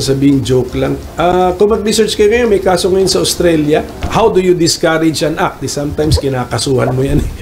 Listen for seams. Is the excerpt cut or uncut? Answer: cut